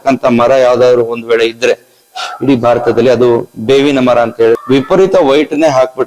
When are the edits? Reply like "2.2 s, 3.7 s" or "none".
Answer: 4.6 s